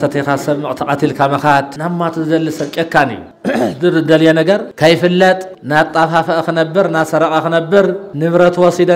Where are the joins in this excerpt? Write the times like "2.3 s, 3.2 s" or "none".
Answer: 1.7 s, 3.3 s, 4.7 s, 5.5 s, 8.1 s